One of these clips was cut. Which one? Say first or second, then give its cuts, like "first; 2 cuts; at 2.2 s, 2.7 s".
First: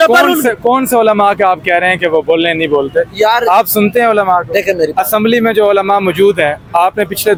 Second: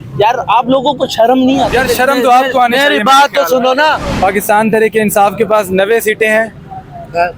second; 2 cuts; at 1.7 s, 4.1 s